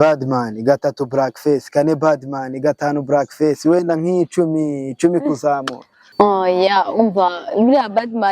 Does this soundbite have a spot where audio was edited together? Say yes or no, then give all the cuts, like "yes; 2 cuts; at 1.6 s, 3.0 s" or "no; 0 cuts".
yes; 1 cut; at 6.1 s